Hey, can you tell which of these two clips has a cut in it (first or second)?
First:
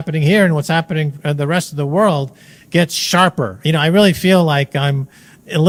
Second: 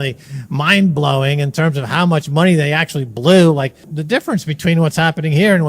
second